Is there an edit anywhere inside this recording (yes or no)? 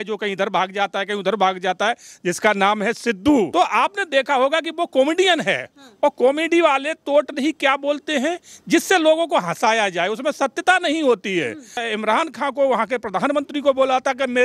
yes